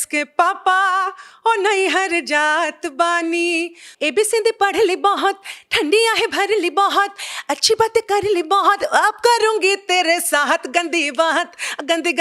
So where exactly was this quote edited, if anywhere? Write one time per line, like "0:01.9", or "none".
0:03.8